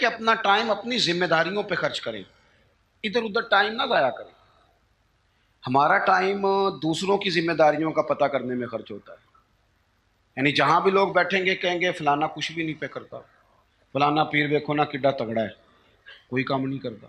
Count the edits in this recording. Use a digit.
0